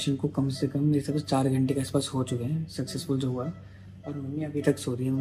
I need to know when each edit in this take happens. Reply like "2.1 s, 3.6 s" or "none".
none

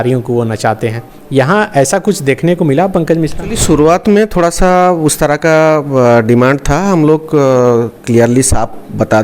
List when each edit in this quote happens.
3.6 s

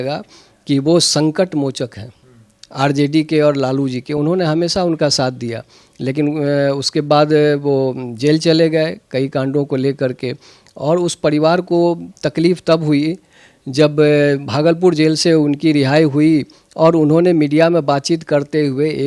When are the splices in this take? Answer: none

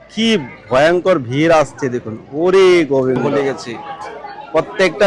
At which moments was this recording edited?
3.2 s

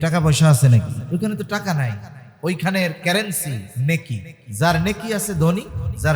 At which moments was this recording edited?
1.0 s, 3.7 s

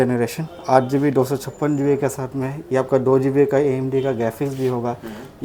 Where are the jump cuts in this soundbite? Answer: none

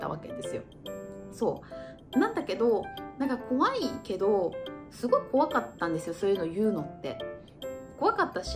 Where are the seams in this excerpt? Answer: none

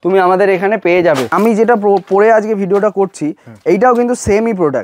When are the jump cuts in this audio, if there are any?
1.3 s

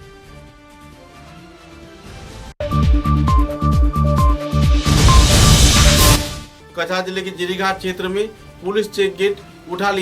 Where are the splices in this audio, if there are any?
6.3 s

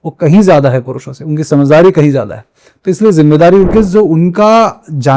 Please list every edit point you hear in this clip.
3.7 s

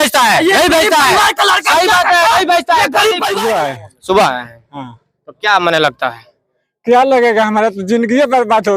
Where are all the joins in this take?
3.3 s

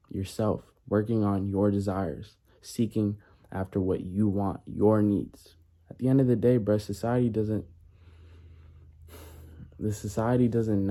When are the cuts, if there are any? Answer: none

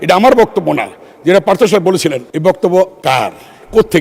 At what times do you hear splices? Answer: 2.3 s, 3.0 s

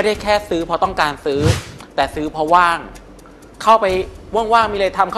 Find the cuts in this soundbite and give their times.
none

